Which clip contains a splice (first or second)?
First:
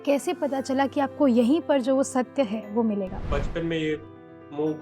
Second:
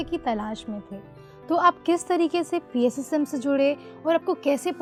first